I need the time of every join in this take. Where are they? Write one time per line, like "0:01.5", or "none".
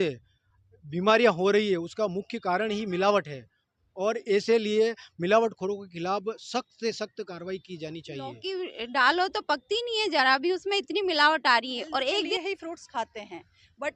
0:08.4
0:12.3